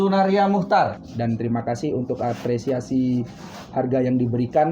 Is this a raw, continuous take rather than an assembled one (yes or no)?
no